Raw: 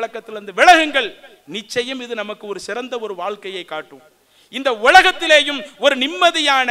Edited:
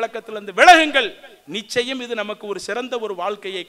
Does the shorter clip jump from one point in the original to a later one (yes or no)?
no